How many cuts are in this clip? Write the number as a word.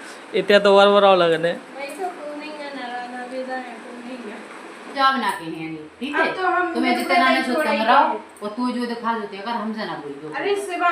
one